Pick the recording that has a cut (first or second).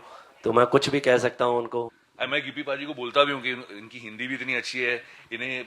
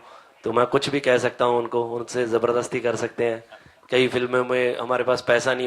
first